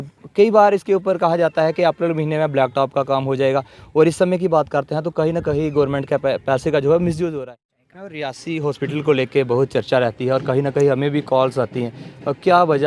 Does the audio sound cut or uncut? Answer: cut